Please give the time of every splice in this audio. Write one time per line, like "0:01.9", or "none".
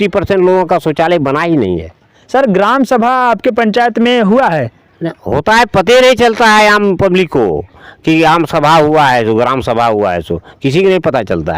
0:02.1